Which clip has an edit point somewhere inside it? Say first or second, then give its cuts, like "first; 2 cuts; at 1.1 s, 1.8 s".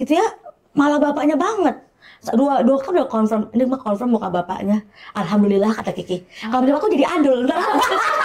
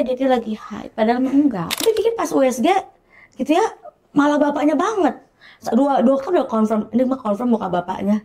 second; 1 cut; at 1.8 s